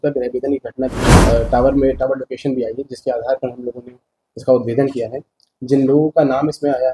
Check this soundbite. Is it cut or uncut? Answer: cut